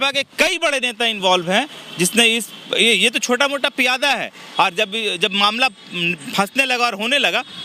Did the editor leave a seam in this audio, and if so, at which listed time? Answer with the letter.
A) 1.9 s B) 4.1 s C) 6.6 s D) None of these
D